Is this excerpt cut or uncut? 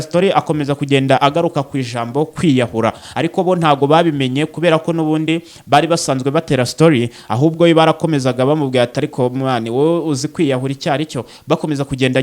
uncut